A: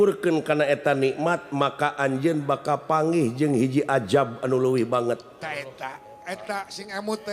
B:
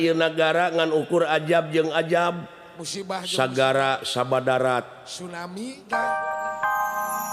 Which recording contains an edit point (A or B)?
B